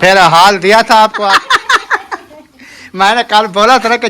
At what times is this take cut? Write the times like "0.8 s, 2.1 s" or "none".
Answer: 1.3 s